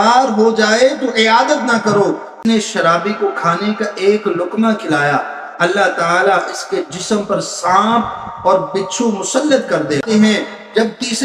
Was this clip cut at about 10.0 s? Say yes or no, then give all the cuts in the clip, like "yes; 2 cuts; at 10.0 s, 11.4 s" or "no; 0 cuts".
yes; 2 cuts; at 2.3 s, 10.0 s